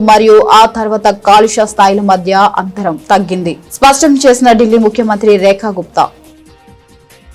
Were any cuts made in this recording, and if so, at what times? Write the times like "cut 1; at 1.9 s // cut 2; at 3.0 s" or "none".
cut 1; at 6.2 s